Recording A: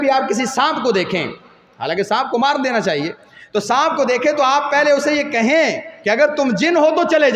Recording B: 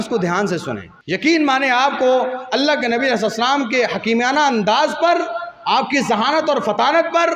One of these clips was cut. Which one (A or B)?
B